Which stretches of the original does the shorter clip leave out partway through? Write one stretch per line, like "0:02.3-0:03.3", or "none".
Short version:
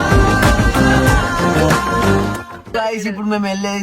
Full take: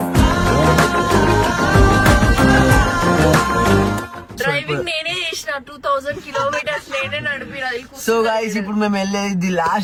0:04.4-0:08.2